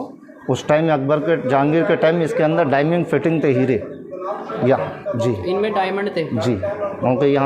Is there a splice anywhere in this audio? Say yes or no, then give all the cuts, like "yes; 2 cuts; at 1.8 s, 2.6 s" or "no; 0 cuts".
no; 0 cuts